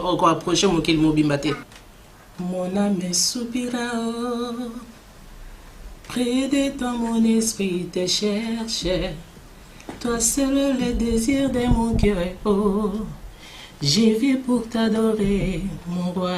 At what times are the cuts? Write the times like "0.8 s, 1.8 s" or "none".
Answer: 1.7 s